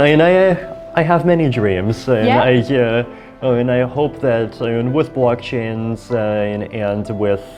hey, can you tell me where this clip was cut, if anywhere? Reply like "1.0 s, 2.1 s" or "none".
none